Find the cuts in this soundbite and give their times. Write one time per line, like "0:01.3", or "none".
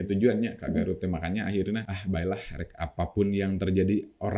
0:01.9